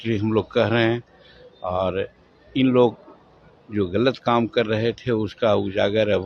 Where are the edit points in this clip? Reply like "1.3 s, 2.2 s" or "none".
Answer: none